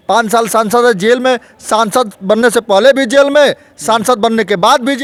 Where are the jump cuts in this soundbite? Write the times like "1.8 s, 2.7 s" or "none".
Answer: none